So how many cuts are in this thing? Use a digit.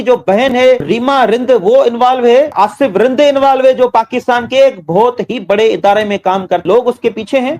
3